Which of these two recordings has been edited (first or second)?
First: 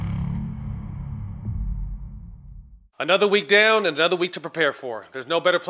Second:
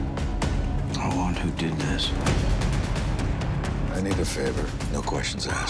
first